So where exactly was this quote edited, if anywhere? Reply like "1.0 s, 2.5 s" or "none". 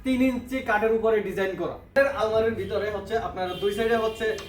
1.2 s